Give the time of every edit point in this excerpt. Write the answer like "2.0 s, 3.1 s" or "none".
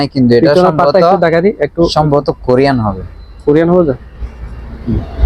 none